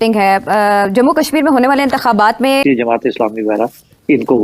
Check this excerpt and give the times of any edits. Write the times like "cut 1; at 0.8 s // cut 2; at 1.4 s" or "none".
cut 1; at 2.6 s